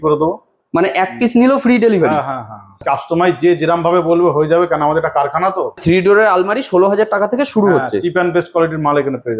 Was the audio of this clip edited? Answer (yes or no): yes